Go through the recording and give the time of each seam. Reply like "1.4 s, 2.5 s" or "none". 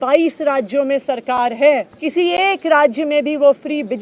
1.9 s